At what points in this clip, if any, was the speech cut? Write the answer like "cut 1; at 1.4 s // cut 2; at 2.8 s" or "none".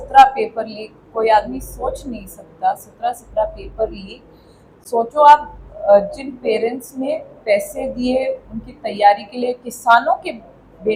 none